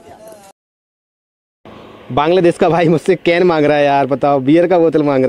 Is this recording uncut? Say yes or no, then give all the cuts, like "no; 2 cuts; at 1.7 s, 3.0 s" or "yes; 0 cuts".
yes; 0 cuts